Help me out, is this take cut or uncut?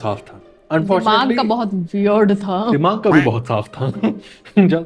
uncut